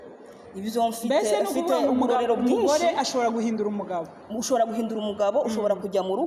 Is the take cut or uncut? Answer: uncut